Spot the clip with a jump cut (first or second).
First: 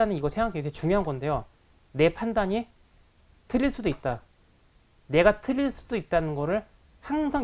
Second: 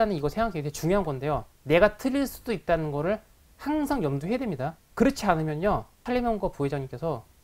second